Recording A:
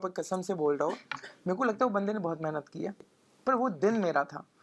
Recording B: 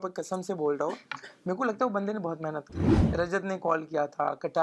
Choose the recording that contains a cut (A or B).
B